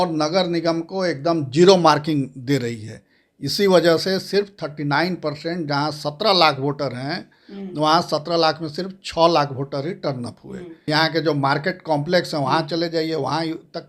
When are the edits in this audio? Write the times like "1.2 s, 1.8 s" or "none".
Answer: 10.8 s